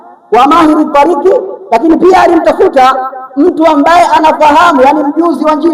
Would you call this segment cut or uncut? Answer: uncut